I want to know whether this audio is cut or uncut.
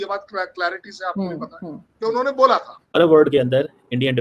cut